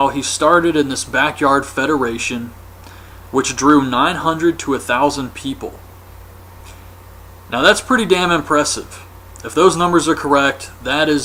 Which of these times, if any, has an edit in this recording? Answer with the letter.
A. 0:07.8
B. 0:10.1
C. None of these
C